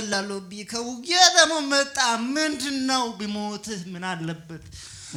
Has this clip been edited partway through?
no; 0 cuts

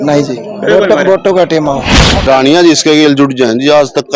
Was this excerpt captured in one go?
no; 1 cut; at 1.9 s

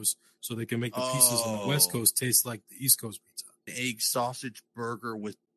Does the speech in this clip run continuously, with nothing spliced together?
no; 1 cut; at 3.7 s

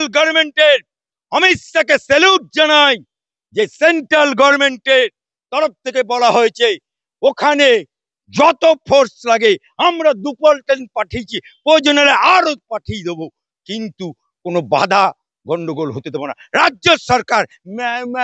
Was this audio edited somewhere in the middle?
no; 0 cuts

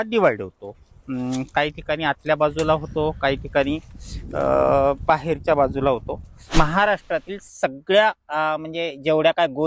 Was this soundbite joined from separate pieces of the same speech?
yes; 1 cut; at 6.5 s

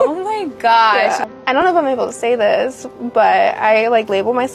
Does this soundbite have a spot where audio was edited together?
yes; 1 cut; at 1.2 s

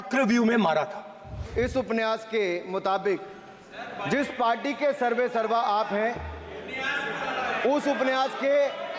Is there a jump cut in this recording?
yes; 1 cut; at 1.6 s

